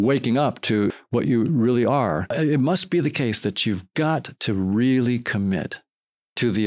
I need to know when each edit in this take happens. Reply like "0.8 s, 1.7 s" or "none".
1.0 s, 2.3 s